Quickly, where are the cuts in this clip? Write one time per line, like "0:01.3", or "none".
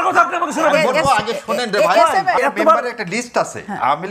0:02.4